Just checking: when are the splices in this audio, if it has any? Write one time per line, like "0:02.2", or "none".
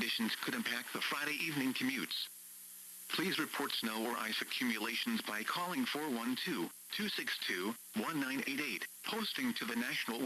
0:01.0